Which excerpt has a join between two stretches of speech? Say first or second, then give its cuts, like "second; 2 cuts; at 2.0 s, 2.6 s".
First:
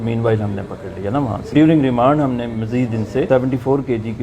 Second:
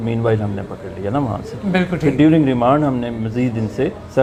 first; 2 cuts; at 1.5 s, 3.3 s